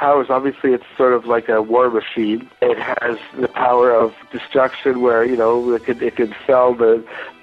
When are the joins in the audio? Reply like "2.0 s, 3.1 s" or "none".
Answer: 2.6 s, 4.1 s

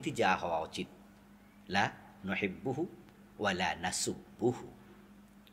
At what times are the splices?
none

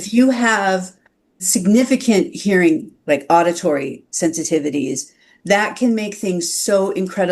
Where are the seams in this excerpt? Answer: 1.4 s

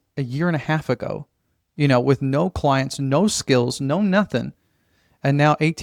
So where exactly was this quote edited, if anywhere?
none

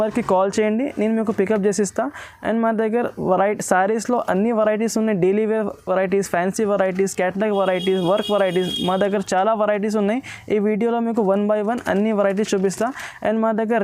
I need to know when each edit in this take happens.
none

